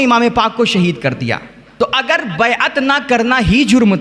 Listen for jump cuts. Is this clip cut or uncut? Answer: cut